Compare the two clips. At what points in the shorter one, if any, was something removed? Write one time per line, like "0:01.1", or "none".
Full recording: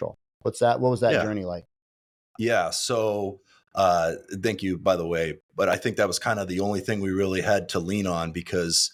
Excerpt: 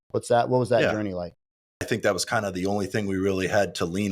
0:01.9